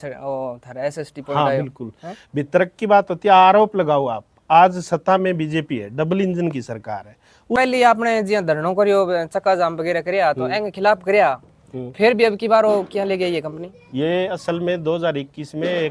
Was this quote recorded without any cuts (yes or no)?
no